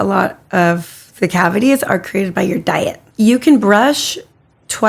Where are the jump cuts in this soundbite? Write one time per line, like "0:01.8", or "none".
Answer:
0:03.0